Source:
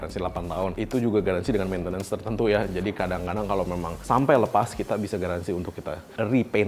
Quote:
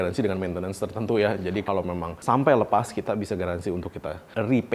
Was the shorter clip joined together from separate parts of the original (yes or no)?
yes